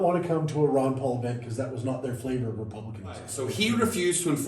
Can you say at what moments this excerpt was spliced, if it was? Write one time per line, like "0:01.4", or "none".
0:03.4